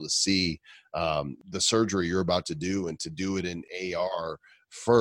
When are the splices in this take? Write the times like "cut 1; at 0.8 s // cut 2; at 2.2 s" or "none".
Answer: cut 1; at 1.4 s // cut 2; at 3.6 s